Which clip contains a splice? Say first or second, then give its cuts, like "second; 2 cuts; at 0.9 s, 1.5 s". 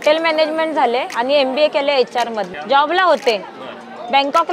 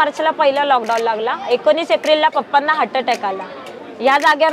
first; 1 cut; at 2.5 s